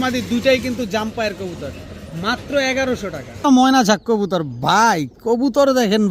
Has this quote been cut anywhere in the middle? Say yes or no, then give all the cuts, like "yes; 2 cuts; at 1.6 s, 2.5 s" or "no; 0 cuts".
yes; 1 cut; at 3.4 s